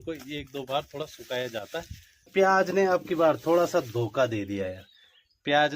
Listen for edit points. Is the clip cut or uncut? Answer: cut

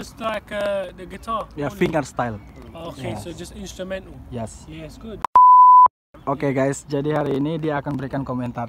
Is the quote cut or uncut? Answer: cut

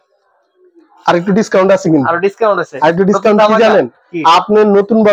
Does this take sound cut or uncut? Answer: uncut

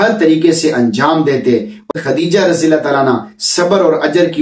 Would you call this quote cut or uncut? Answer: cut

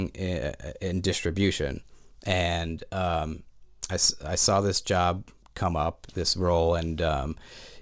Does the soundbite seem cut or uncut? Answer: uncut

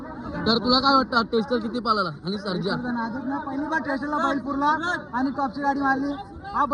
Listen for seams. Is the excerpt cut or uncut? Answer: uncut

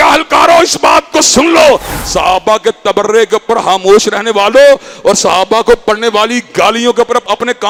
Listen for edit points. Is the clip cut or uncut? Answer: uncut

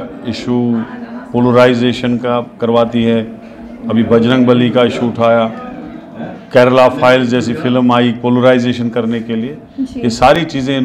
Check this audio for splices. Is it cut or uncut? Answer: uncut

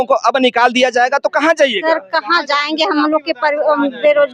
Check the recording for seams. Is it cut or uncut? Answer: uncut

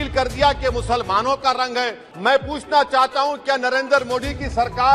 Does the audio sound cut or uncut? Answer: cut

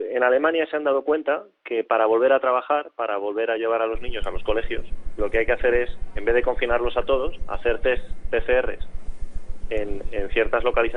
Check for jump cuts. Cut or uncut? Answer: uncut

